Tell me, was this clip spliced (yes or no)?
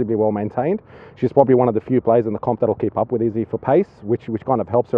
no